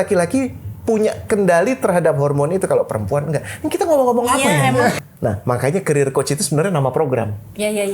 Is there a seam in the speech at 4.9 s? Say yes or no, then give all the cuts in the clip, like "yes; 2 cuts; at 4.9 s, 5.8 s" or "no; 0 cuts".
yes; 1 cut; at 4.9 s